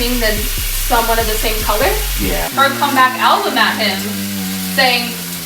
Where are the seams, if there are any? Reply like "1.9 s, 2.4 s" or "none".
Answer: 2.5 s